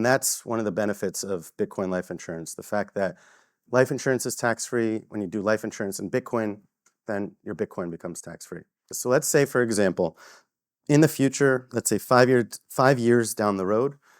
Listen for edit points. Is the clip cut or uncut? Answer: cut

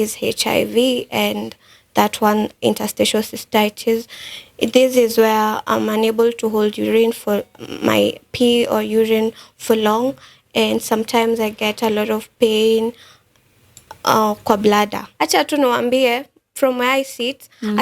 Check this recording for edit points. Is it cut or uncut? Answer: cut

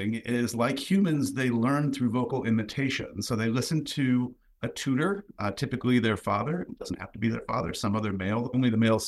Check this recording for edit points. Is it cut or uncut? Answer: uncut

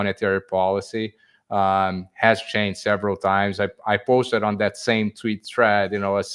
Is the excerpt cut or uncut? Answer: uncut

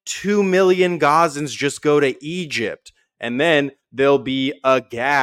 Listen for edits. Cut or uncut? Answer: uncut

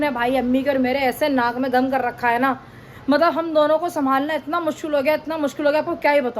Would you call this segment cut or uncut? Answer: uncut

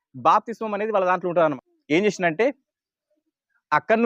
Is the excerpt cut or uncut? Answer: cut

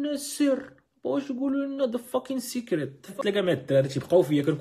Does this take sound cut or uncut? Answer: cut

